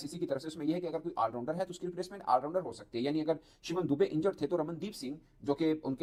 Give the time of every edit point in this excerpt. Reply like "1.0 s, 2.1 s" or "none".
none